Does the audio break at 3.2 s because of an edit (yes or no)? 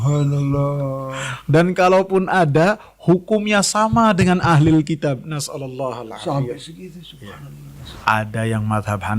no